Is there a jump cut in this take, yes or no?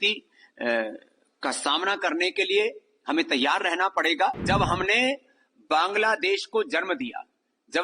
yes